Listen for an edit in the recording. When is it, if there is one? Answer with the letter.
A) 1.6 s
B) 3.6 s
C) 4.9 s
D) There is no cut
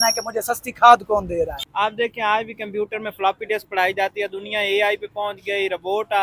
A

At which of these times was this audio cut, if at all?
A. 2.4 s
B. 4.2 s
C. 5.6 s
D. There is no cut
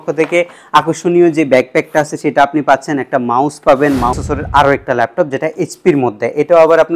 B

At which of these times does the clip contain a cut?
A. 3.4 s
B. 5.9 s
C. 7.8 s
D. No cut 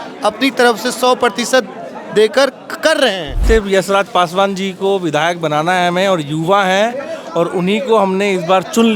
A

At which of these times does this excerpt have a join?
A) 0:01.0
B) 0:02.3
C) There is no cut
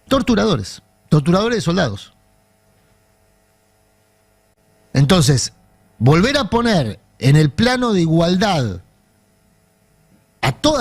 C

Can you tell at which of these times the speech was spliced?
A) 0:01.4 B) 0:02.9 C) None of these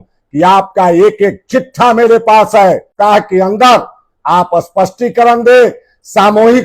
B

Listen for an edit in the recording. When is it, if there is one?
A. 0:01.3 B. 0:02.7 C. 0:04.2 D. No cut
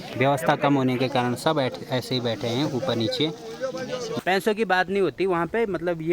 C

